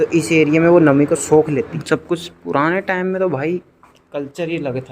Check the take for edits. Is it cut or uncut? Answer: cut